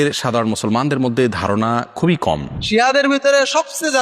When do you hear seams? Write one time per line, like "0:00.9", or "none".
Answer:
0:02.8